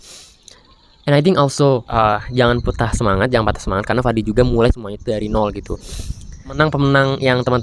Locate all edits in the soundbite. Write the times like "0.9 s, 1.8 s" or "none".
1.9 s, 6.6 s